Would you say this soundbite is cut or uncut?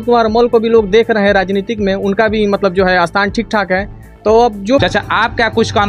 cut